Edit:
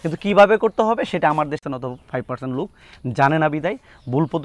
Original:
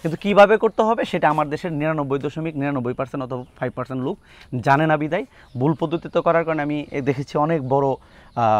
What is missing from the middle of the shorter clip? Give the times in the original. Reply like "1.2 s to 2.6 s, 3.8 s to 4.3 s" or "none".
1.6 s to 3.1 s